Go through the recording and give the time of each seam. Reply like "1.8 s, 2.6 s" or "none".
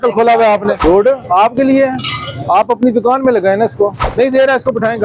0.8 s, 4.1 s